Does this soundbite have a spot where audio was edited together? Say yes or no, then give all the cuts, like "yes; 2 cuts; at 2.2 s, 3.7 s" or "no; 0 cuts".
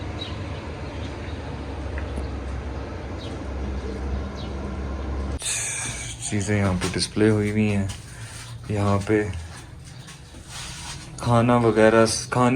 yes; 1 cut; at 5.4 s